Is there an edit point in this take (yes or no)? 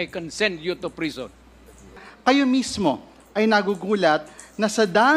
yes